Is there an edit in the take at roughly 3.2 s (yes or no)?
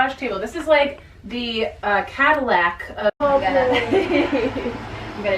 yes